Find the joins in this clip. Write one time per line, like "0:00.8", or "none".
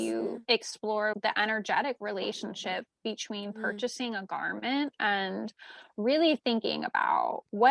0:01.1